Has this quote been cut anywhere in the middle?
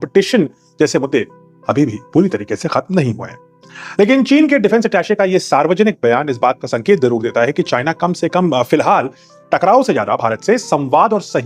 no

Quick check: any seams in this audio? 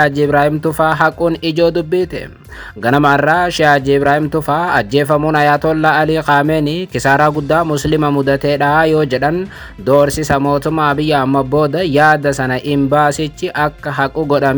no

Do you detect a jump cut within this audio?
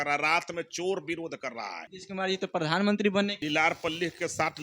yes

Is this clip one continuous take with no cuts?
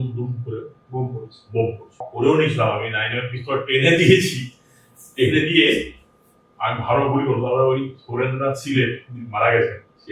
no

